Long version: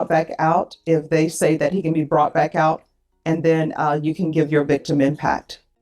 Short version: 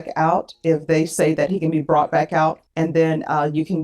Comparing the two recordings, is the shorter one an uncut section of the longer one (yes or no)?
no